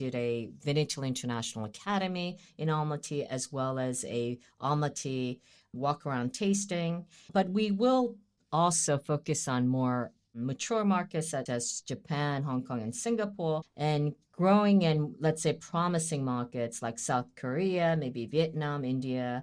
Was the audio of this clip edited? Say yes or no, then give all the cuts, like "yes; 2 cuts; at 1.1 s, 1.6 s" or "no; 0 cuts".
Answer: yes; 1 cut; at 11.5 s